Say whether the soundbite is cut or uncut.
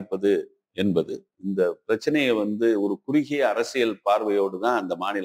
uncut